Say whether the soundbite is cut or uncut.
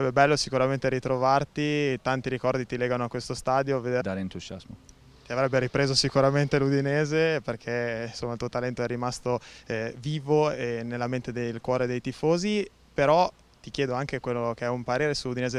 uncut